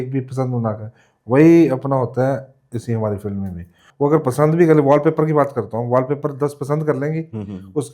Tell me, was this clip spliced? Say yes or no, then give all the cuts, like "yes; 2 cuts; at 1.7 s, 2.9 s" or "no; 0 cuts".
yes; 1 cut; at 3.8 s